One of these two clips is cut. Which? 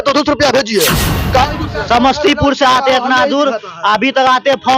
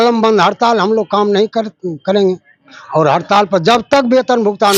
first; 1 cut; at 1.1 s

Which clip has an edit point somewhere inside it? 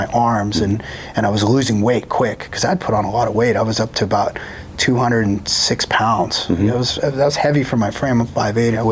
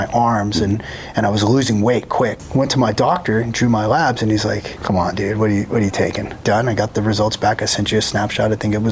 second; 3 cuts; at 2.4 s, 4.7 s, 6.4 s

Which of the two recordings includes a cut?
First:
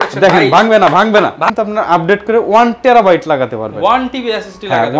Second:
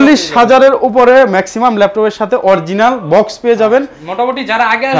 first; 1 cut; at 1.5 s

